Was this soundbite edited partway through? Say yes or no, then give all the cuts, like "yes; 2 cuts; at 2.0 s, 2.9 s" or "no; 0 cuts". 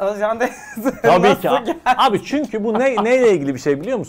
no; 0 cuts